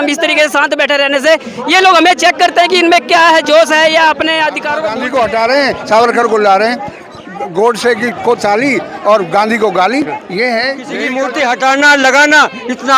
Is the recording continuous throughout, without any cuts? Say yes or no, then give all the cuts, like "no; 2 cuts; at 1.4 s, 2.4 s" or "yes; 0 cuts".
no; 2 cuts; at 4.9 s, 11.1 s